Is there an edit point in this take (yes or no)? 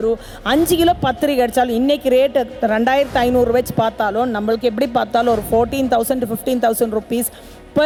no